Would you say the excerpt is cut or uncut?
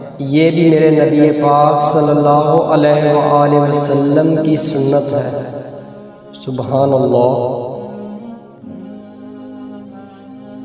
uncut